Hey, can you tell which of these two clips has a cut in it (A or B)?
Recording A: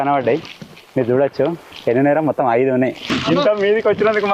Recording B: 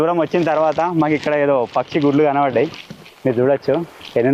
A